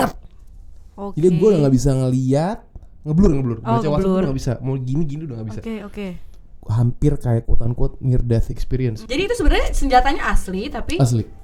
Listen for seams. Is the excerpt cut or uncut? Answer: cut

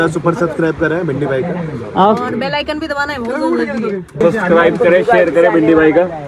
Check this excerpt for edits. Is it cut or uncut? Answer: cut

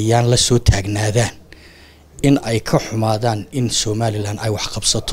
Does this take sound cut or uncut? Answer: uncut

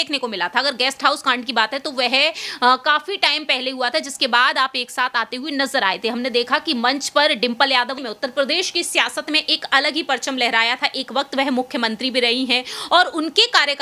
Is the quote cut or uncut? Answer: cut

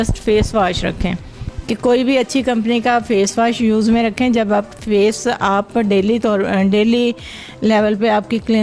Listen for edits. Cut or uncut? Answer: uncut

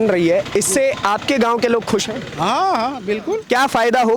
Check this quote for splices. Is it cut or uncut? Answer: uncut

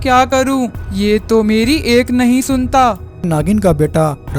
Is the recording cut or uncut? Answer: cut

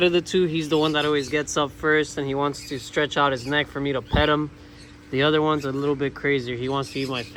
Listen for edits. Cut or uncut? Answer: uncut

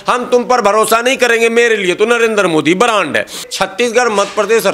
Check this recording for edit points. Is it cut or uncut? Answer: cut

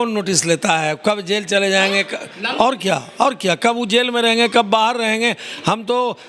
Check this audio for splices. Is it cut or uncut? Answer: uncut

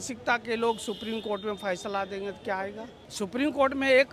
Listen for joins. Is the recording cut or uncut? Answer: cut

